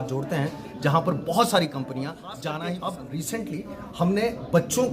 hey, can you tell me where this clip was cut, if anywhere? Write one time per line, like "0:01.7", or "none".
0:02.6